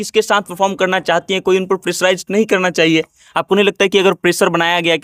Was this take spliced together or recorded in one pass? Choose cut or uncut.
uncut